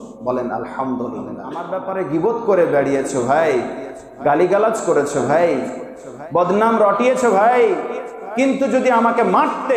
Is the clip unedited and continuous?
no; 1 cut; at 1.8 s

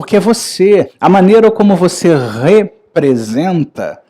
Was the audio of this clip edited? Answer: yes; 1 cut; at 0.9 s

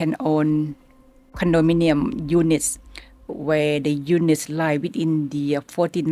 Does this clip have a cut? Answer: no; 0 cuts

